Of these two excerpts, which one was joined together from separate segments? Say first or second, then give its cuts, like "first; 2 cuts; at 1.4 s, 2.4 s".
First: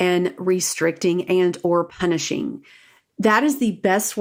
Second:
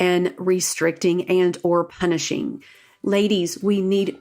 second; 1 cut; at 2.9 s